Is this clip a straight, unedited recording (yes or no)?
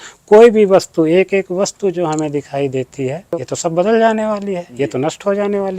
no